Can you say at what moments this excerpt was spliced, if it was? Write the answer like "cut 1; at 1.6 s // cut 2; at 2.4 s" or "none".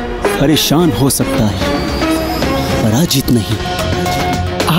none